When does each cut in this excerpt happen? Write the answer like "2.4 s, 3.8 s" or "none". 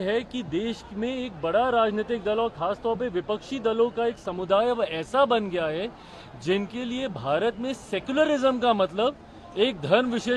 none